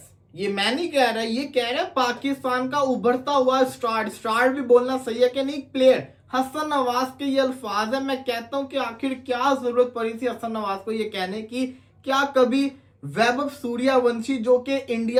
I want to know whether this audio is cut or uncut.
uncut